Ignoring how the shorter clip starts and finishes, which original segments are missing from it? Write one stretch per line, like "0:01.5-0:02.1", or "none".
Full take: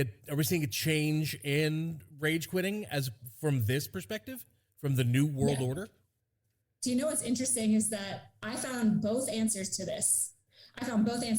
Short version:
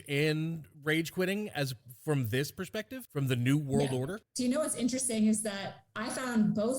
0:04.4-0:04.7
0:05.9-0:06.7